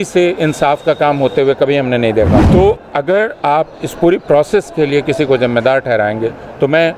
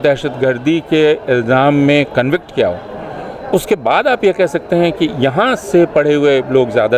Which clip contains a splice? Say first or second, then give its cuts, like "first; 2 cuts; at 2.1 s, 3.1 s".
first; 1 cut; at 2.5 s